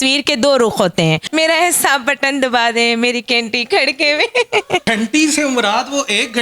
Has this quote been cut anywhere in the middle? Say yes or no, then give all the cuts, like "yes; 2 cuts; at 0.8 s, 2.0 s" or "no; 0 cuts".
yes; 2 cuts; at 1.2 s, 4.8 s